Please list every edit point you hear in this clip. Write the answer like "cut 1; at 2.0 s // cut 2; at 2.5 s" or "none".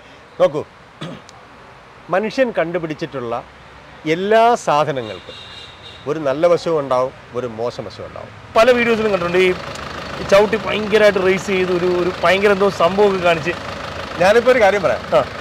cut 1; at 8.5 s